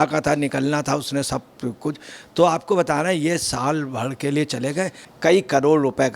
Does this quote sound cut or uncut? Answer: cut